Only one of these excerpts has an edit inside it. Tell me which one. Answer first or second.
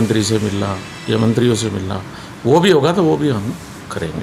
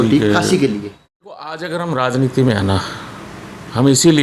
second